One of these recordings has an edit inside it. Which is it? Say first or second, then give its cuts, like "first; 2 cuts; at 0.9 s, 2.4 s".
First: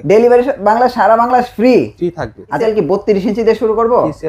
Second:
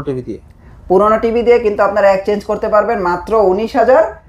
first; 1 cut; at 2.6 s